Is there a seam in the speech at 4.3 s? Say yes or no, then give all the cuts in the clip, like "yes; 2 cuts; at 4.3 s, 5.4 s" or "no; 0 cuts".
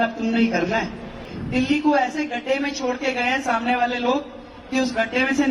no; 1 cut; at 1.3 s